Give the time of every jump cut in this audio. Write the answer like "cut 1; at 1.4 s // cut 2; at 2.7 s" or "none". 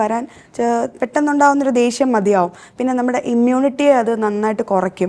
none